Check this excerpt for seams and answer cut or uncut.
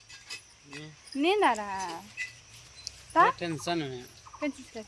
uncut